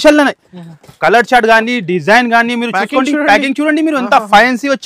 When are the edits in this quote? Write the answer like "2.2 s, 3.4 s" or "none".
none